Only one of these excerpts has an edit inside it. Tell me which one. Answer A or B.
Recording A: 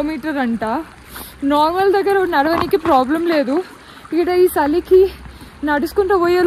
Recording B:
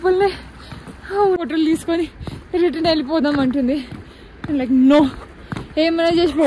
B